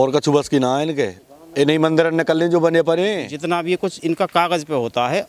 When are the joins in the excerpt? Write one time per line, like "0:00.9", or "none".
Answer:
0:03.3